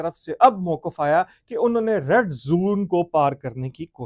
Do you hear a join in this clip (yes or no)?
no